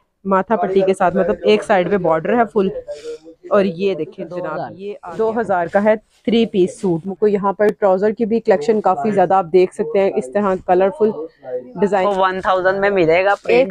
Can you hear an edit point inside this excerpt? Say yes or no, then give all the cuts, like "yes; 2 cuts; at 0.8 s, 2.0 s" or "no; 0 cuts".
yes; 3 cuts; at 4.7 s, 7.1 s, 12.0 s